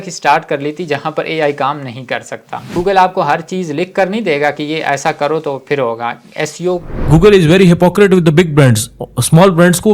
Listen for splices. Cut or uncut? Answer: cut